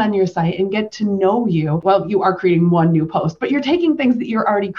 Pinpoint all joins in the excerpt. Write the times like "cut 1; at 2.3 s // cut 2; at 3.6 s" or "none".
cut 1; at 1.8 s